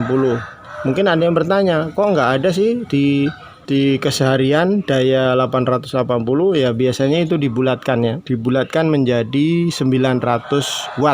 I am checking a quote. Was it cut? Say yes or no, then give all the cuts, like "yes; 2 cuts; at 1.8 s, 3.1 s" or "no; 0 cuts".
yes; 1 cut; at 8.2 s